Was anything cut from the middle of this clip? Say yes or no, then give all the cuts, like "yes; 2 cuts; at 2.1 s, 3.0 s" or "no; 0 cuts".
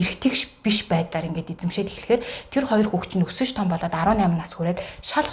no; 0 cuts